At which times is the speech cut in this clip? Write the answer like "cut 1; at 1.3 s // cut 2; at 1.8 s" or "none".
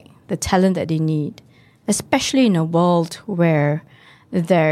none